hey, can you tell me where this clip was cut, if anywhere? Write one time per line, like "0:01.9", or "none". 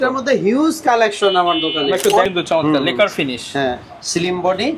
0:02.3